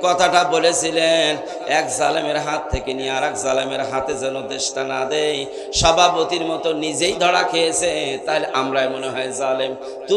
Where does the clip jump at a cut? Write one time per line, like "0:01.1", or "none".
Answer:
none